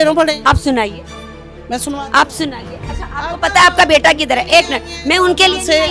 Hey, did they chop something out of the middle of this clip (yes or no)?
no